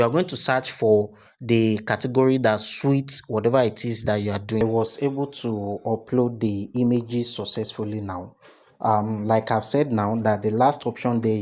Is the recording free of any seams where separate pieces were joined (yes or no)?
no